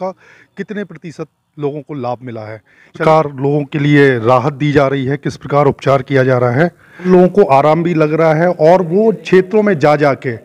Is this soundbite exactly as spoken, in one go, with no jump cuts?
no; 2 cuts; at 3.0 s, 7.0 s

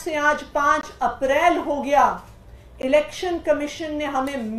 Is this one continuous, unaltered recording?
yes; 0 cuts

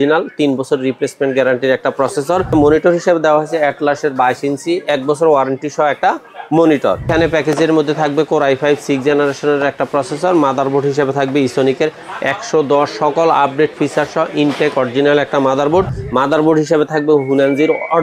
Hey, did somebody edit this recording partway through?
yes; 3 cuts; at 2.5 s, 7.1 s, 16.0 s

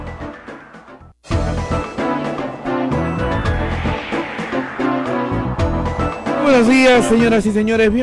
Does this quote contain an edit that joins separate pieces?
yes; 2 cuts; at 1.1 s, 2.6 s

